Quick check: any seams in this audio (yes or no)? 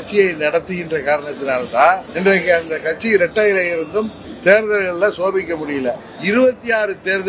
yes